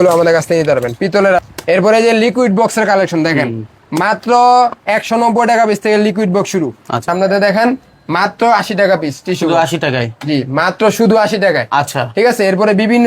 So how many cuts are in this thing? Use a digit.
2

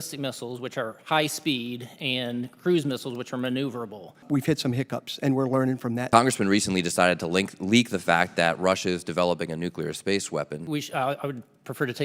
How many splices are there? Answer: 3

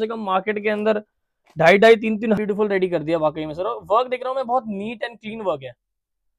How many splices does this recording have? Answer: 1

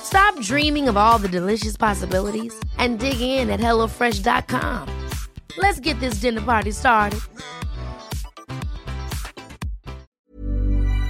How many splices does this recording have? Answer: 1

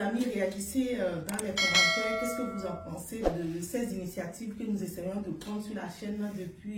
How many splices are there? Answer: 1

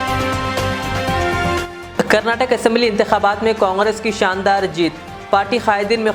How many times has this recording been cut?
1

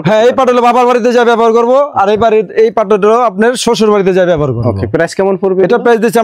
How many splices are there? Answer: 0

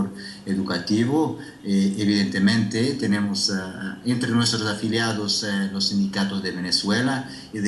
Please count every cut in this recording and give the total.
1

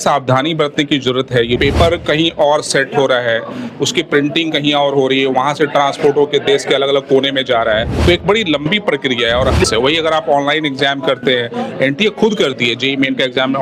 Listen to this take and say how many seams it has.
3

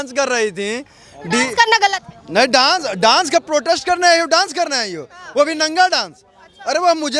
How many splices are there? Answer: 0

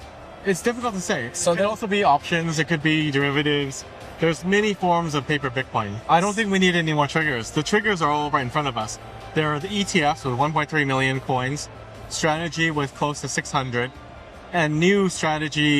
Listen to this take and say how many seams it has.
1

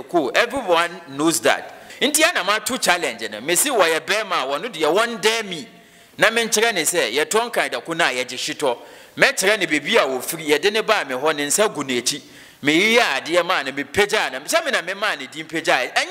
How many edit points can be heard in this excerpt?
1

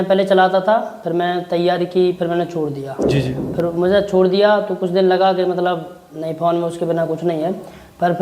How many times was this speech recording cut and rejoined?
0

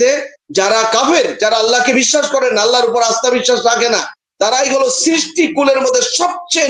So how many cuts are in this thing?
0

